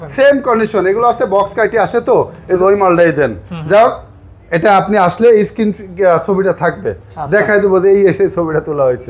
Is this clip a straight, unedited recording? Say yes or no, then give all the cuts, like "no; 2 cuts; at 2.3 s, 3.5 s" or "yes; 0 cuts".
no; 1 cut; at 2.6 s